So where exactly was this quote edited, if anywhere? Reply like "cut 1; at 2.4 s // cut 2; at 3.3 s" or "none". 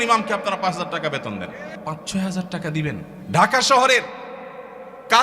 cut 1; at 1.7 s // cut 2; at 3.1 s